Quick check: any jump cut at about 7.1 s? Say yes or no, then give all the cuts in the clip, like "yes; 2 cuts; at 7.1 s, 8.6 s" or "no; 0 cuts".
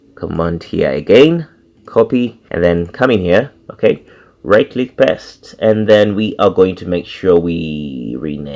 no; 1 cut; at 2.4 s